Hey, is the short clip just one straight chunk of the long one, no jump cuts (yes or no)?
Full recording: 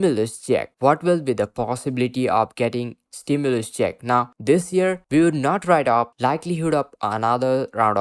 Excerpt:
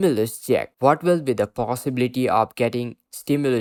yes